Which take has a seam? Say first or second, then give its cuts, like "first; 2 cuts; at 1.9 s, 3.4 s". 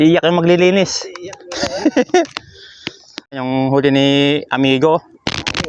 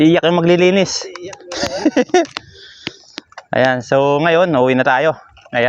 first; 1 cut; at 3.3 s